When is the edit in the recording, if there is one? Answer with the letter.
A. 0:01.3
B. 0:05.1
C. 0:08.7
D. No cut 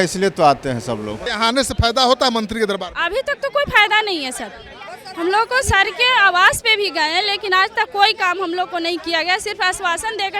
A